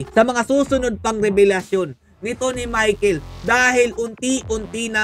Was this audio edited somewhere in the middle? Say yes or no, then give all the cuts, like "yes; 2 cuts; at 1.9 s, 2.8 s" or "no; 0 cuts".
no; 0 cuts